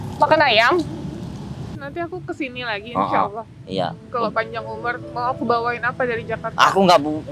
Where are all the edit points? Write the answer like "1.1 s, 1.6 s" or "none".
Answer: 1.7 s